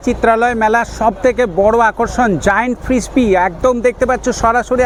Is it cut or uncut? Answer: uncut